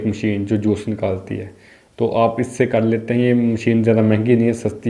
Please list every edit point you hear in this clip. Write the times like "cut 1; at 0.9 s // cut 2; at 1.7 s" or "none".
none